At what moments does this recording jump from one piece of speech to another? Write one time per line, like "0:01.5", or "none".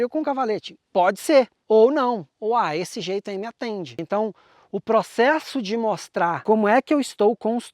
0:01.6
0:04.0
0:06.4